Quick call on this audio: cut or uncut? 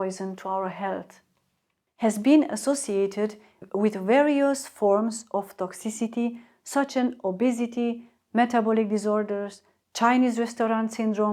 cut